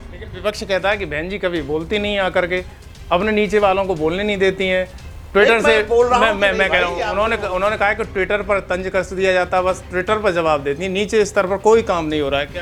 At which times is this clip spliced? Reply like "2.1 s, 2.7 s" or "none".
none

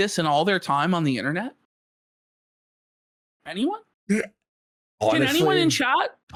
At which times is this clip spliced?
none

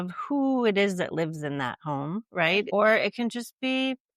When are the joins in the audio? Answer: 2.7 s

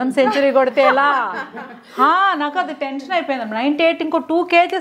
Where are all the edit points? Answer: none

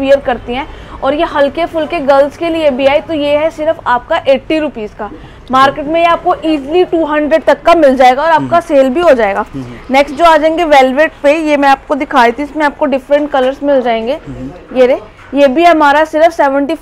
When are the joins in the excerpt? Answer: none

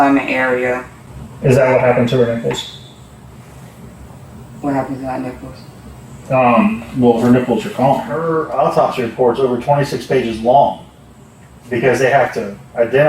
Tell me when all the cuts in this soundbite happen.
1.0 s, 8.4 s

